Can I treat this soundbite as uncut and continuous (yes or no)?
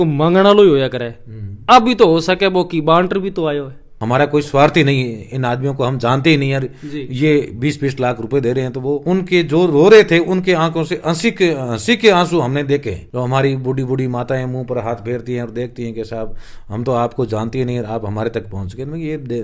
no